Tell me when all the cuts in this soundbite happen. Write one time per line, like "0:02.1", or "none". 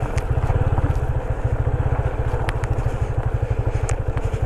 none